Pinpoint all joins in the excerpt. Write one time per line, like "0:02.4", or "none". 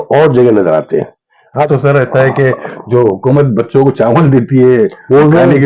0:01.7